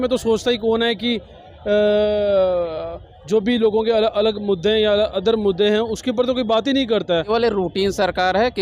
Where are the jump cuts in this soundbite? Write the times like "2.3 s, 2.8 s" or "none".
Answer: 7.3 s

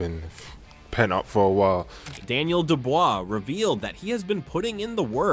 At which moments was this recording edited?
none

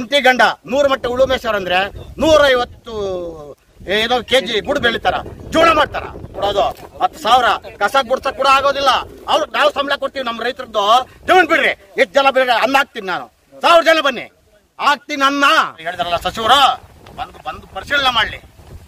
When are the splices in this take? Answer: 6.3 s, 15.9 s

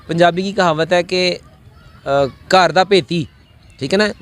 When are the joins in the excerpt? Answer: none

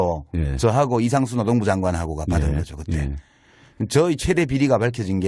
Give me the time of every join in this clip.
1.8 s

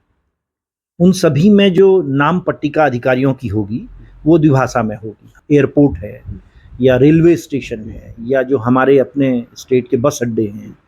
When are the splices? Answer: 5.3 s

